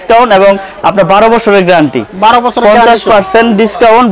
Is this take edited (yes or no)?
no